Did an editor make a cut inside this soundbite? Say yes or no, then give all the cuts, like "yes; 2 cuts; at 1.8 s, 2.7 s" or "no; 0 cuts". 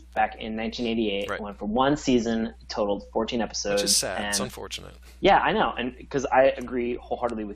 yes; 1 cut; at 1.5 s